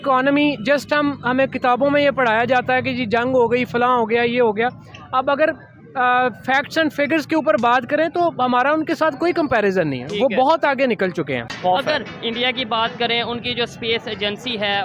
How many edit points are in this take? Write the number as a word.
one